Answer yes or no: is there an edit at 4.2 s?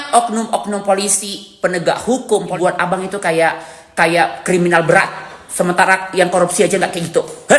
no